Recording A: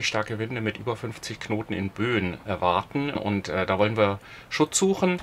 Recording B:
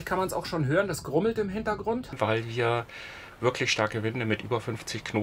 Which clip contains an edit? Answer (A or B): B